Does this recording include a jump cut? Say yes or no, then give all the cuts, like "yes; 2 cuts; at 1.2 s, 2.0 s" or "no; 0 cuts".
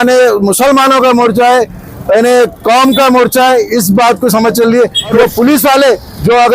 yes; 1 cut; at 5.1 s